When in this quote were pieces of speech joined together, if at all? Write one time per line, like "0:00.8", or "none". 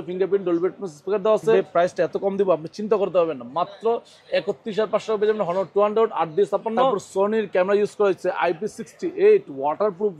0:01.5
0:07.0